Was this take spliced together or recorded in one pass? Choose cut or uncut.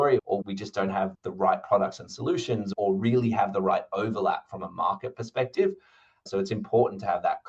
cut